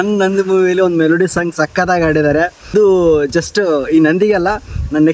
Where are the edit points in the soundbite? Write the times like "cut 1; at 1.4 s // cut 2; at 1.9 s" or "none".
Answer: cut 1; at 2.7 s